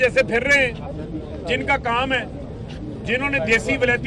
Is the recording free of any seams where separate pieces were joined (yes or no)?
yes